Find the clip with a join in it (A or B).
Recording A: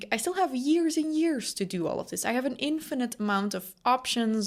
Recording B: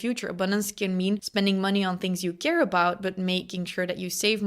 B